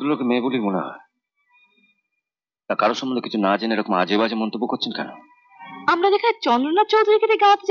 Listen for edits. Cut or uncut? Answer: uncut